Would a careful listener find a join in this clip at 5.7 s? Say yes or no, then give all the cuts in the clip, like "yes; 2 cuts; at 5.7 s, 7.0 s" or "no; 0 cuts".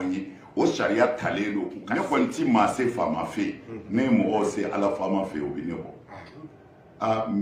no; 1 cut; at 1.8 s